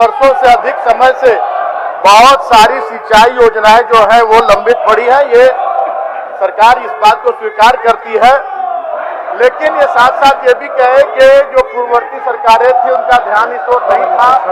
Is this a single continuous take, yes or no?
yes